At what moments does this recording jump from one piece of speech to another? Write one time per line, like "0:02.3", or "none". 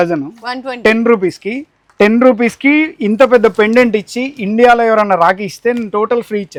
none